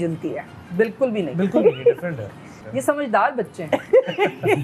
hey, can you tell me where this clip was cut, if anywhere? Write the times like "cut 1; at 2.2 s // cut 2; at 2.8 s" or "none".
cut 1; at 2.5 s